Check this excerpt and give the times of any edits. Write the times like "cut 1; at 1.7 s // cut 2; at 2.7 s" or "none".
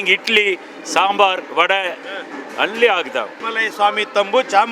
cut 1; at 3.4 s